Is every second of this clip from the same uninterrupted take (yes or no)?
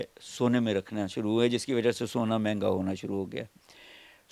yes